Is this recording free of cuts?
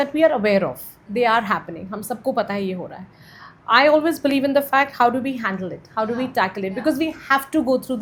yes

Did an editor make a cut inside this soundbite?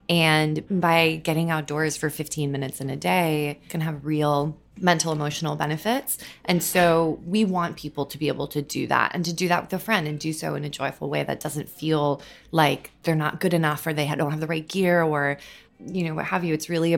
no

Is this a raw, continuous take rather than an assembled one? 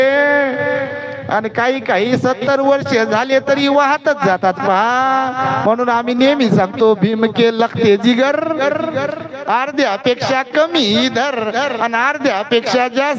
yes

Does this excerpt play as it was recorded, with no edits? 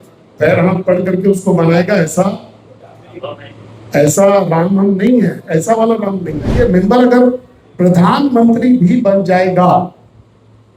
no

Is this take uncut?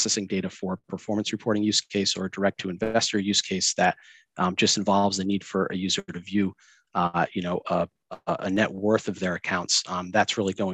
yes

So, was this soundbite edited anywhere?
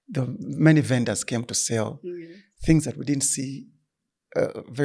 no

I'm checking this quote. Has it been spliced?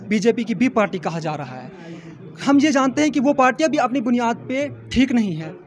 no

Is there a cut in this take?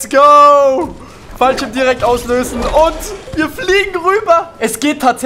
no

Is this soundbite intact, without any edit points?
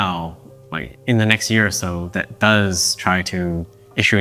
yes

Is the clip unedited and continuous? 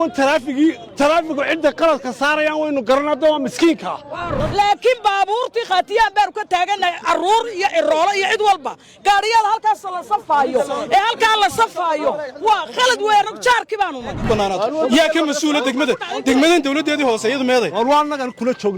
no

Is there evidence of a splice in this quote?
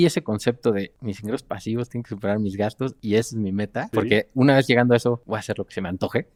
no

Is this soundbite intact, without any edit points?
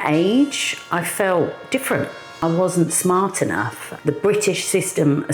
no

